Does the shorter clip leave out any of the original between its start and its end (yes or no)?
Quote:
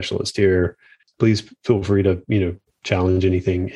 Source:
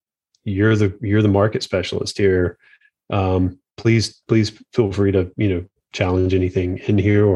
yes